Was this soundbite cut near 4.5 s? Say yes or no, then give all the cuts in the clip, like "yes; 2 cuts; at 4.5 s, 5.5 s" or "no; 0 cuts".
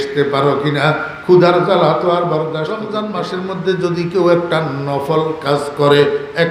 no; 1 cut; at 2.9 s